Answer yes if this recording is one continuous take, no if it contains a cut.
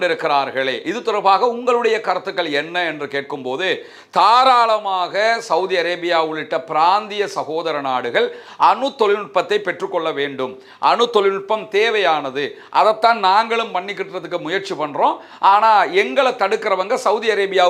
yes